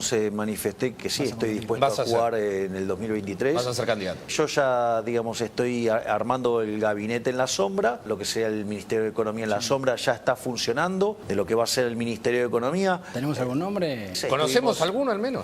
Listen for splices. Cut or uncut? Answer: cut